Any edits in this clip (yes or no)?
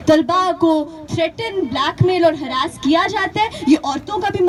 no